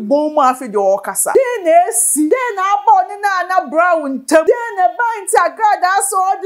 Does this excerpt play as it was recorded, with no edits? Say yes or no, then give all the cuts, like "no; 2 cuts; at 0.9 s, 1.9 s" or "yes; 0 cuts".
no; 3 cuts; at 1.2 s, 2.3 s, 4.4 s